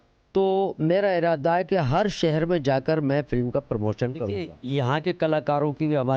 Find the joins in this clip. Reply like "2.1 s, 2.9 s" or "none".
4.5 s